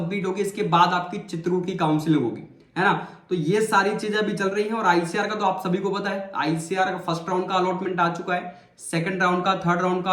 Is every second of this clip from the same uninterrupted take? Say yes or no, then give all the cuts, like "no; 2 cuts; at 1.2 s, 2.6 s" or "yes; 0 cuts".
yes; 0 cuts